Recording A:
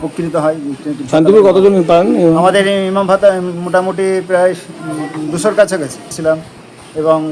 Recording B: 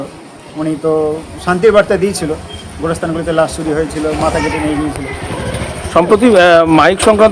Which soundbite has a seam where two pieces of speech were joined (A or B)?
A